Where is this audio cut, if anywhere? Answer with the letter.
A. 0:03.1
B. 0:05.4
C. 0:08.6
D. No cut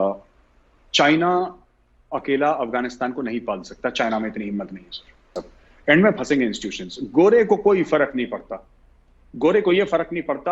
B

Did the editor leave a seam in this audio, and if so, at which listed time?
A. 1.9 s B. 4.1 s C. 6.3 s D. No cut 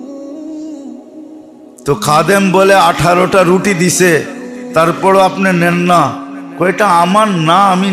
A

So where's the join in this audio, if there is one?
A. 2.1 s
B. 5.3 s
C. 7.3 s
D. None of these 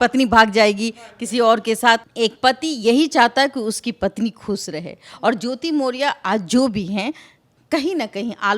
A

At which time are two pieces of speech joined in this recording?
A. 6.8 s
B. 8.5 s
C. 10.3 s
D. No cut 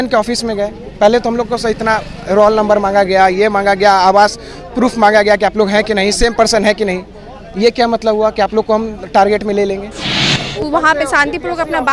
C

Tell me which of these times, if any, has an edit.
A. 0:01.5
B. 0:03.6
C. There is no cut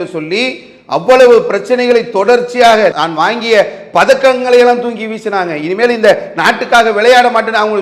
C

